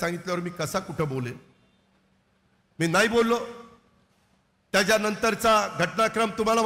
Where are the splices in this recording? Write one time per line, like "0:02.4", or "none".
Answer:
none